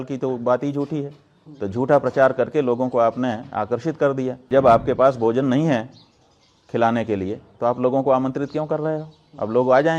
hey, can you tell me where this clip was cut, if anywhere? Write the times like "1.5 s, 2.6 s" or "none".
4.4 s